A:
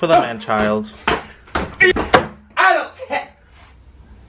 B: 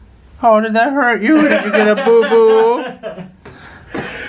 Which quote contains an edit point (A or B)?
A